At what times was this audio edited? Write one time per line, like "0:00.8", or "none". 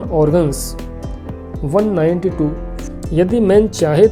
0:02.9